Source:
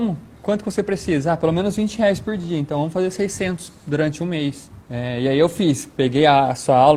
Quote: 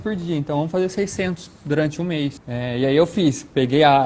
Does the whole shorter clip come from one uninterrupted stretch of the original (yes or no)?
no